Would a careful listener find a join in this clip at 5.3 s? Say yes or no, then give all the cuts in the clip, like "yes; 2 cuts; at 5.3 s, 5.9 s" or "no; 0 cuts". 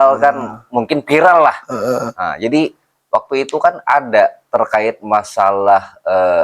no; 0 cuts